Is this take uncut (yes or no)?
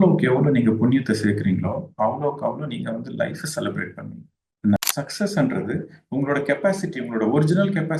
no